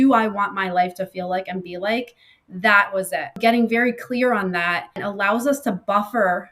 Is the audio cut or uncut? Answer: cut